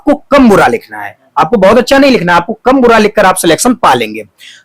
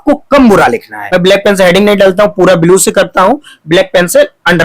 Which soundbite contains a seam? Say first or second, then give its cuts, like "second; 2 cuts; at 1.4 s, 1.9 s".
second; 1 cut; at 0.9 s